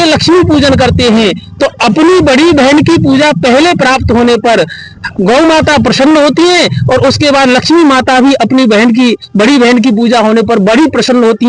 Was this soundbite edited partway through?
no; 0 cuts

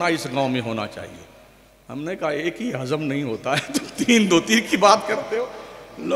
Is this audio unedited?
yes; 0 cuts

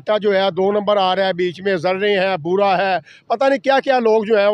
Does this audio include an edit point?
no; 0 cuts

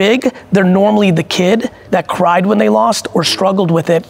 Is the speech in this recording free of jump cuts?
no; 1 cut; at 1.8 s

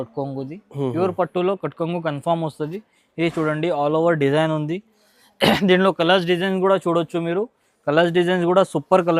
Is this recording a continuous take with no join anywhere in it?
yes; 0 cuts

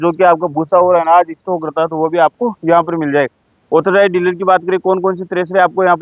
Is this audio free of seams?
yes; 0 cuts

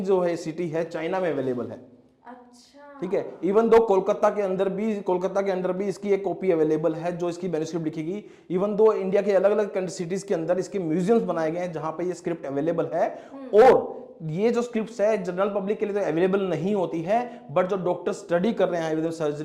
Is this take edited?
no; 0 cuts

